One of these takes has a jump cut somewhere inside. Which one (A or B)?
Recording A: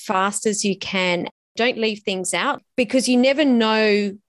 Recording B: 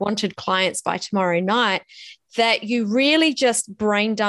A